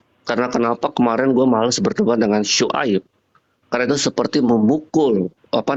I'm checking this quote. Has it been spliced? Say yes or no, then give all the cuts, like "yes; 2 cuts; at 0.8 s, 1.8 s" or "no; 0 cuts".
no; 0 cuts